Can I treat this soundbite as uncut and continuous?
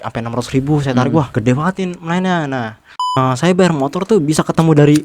no; 2 cuts; at 1.3 s, 3.2 s

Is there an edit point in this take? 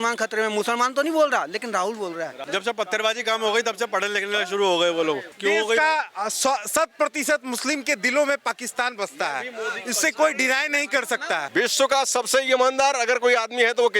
yes; 3 cuts; at 2.4 s, 5.3 s, 11.4 s

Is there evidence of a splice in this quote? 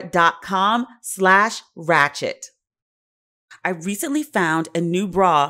yes; 1 cut; at 3.4 s

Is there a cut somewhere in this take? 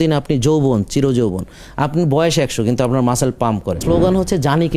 yes; 1 cut; at 3.8 s

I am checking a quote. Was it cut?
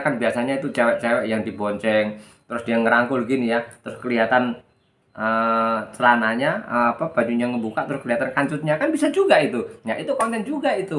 no; 0 cuts

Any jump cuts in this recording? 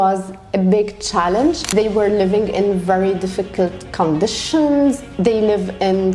yes; 1 cut; at 1.6 s

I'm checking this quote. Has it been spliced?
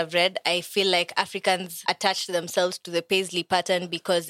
yes; 1 cut; at 1.7 s

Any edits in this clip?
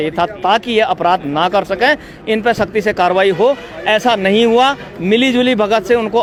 no; 0 cuts

